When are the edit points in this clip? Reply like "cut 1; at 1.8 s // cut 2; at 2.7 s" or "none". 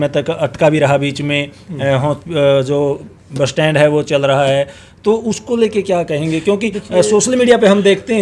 none